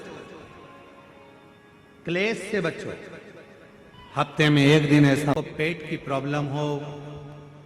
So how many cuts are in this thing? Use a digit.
1